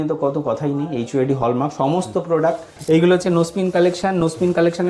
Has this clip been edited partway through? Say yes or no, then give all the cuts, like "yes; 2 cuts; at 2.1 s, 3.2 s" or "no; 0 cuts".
yes; 1 cut; at 2.7 s